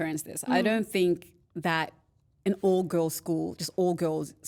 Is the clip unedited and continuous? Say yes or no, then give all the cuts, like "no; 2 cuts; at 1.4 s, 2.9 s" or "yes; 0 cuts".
yes; 0 cuts